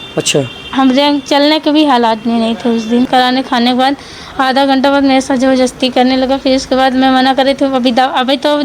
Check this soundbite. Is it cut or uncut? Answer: cut